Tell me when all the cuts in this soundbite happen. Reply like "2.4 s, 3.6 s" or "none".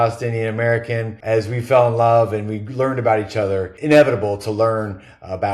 1.1 s, 3.7 s